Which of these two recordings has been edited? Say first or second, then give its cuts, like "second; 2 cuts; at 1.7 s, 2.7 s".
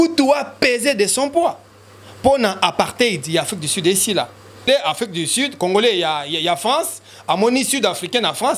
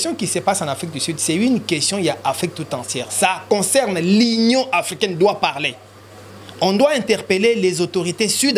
first; 1 cut; at 4.7 s